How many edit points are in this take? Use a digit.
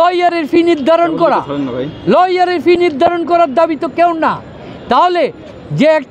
0